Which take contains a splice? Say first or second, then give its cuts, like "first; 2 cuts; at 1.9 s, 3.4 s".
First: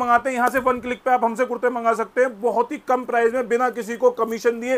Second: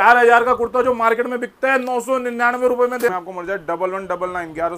second; 1 cut; at 3.1 s